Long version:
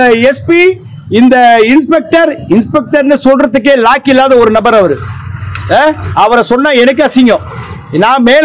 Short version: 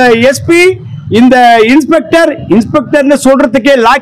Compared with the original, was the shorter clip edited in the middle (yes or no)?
no